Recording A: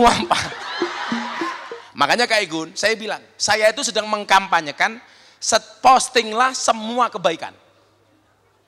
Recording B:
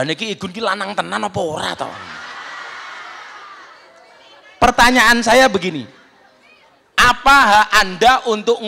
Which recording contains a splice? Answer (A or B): A